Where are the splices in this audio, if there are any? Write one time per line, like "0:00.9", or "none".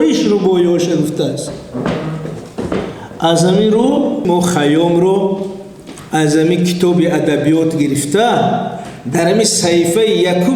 0:04.3